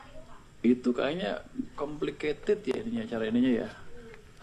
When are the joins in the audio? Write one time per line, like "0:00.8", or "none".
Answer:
0:03.1